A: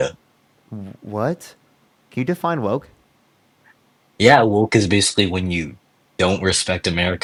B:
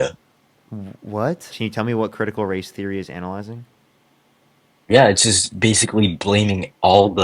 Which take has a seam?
B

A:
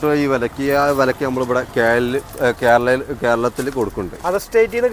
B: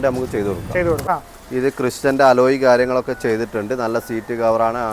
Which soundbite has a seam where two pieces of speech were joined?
B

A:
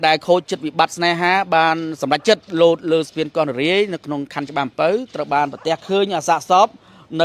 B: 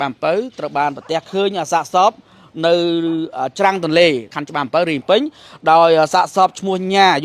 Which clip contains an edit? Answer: B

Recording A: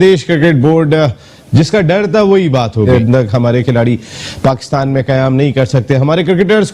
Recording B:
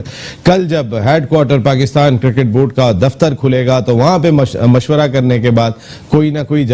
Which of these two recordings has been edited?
A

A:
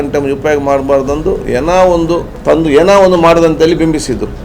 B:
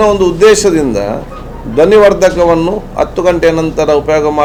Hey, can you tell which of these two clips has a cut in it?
A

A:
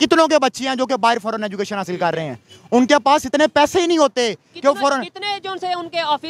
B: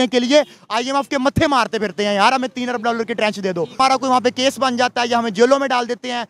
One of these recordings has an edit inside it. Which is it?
B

